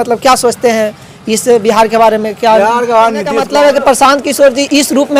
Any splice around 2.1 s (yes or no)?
no